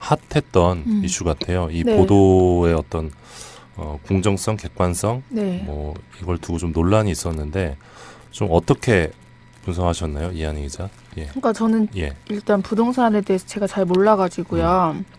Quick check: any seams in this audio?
no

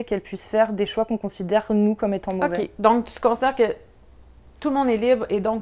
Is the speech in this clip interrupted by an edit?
yes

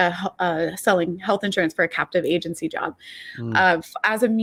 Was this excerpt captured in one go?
yes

